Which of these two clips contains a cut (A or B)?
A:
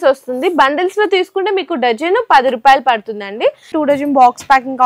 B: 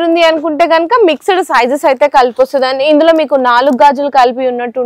A